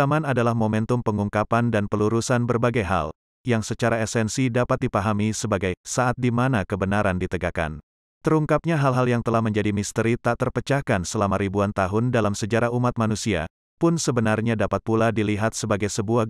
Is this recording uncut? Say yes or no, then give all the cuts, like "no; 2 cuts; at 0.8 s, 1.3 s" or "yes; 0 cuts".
no; 1 cut; at 8.0 s